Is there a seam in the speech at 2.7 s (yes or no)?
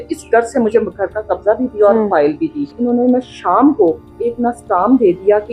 yes